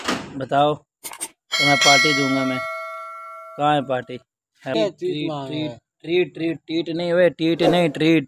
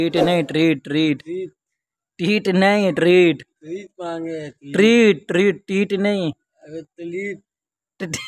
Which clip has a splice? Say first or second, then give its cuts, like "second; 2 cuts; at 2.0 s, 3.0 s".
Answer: first; 1 cut; at 4.7 s